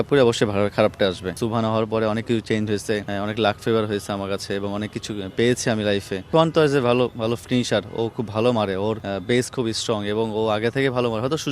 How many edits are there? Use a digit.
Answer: 4